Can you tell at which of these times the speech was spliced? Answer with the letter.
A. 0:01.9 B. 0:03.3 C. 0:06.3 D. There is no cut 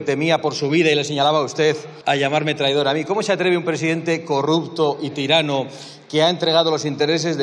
A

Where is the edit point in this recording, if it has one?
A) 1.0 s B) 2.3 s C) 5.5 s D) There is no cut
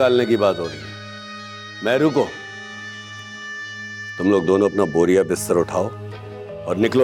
D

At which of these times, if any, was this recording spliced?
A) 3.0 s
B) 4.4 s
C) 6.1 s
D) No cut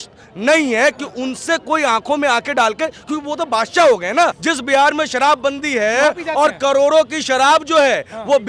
B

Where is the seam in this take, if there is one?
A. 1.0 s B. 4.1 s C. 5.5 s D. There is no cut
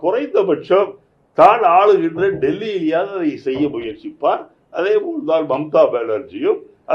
D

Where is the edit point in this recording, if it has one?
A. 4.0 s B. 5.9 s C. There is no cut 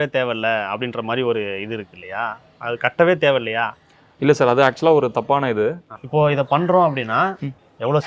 B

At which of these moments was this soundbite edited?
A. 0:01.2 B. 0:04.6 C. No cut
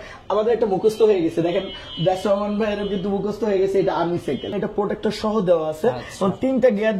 B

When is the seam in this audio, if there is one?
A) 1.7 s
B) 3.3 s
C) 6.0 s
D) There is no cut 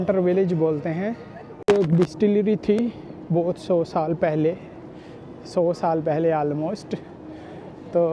A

